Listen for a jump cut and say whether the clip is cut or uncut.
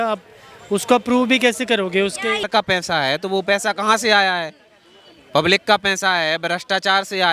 cut